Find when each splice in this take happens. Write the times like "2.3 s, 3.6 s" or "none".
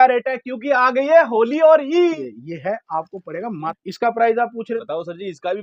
2.2 s, 3.7 s, 4.8 s